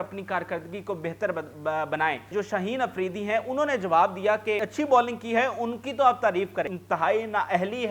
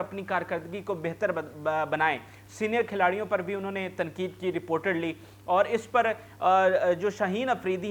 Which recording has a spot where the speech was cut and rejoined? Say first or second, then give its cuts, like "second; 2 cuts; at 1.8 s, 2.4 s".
first; 3 cuts; at 2.3 s, 4.7 s, 6.8 s